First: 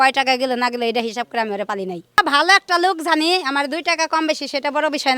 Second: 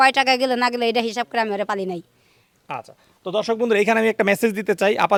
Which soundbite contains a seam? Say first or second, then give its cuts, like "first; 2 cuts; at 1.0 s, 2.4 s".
first; 1 cut; at 2.2 s